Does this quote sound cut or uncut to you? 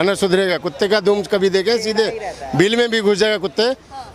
uncut